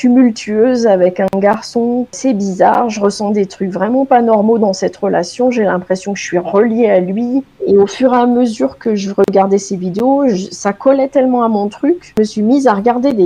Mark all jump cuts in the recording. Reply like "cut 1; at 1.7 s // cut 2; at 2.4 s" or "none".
cut 1; at 2.1 s // cut 2; at 7.5 s // cut 3; at 12.1 s